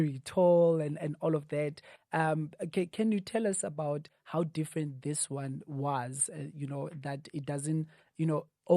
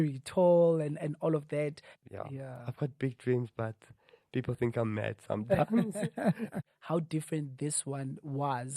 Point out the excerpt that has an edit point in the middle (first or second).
second